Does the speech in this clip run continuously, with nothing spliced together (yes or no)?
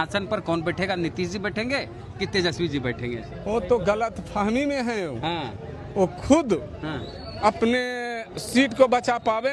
yes